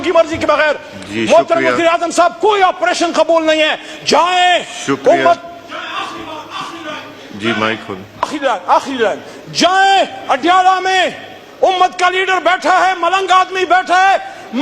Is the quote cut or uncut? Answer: uncut